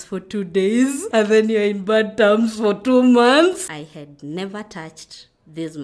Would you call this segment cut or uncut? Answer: cut